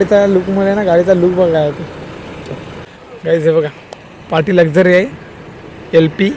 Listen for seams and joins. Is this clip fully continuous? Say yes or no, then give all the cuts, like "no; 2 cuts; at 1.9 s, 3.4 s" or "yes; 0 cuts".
no; 1 cut; at 2.8 s